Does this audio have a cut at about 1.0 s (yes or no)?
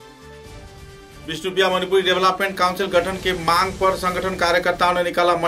yes